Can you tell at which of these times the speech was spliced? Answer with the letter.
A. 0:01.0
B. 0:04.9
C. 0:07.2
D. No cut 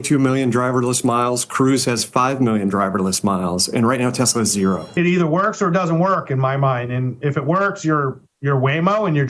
B